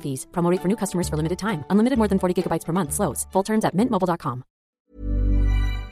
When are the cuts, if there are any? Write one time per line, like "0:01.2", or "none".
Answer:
0:04.6